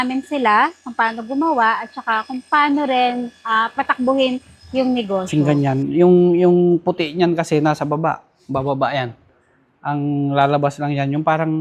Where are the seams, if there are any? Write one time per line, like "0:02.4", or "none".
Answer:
0:05.3